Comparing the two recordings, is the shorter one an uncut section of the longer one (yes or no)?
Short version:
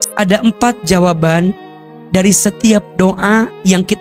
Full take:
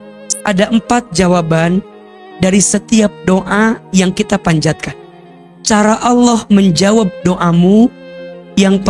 yes